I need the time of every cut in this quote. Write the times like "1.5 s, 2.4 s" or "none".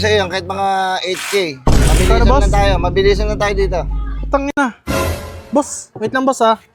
none